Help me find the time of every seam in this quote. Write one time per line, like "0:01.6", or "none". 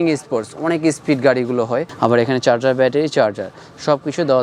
0:01.9